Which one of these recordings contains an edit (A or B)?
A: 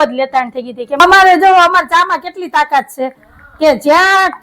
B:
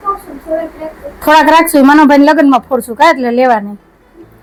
A